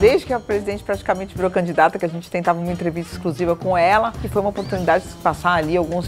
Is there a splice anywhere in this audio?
yes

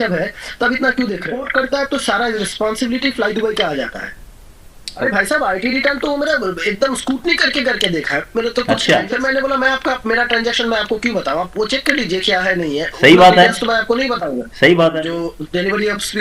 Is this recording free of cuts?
no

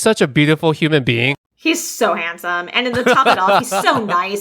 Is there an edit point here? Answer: yes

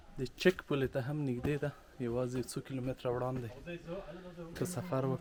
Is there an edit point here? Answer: no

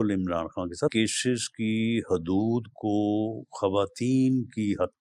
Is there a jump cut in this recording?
yes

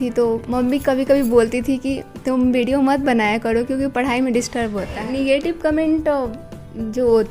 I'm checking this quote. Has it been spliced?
yes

